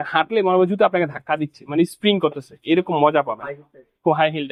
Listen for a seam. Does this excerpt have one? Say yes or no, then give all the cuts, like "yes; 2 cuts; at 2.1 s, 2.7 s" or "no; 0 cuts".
no; 0 cuts